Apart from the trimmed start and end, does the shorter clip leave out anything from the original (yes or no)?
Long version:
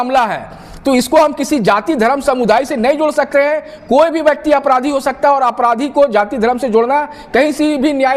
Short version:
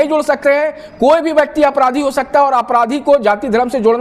no